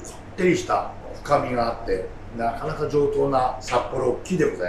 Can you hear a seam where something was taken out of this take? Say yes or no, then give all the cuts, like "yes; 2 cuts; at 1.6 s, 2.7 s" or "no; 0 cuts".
yes; 2 cuts; at 2.2 s, 3.6 s